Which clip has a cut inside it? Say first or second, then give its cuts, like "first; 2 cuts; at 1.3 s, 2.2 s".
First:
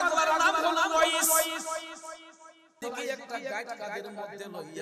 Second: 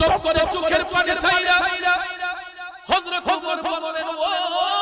first; 1 cut; at 2.8 s